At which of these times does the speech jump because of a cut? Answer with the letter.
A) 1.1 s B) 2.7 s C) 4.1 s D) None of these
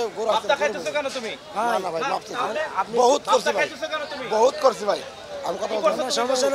D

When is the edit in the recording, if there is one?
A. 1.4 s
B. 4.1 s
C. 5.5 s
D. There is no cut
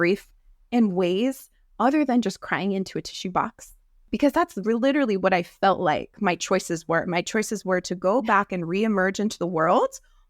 B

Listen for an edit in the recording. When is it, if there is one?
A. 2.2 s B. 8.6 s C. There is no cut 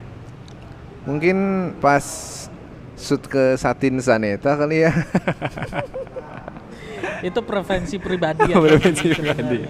C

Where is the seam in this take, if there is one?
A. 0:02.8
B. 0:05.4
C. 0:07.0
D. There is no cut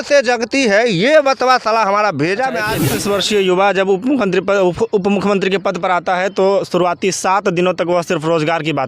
A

